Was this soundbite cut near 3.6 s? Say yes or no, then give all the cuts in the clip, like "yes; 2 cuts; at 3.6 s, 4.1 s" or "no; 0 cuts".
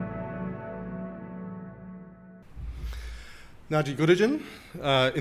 no; 1 cut; at 1.8 s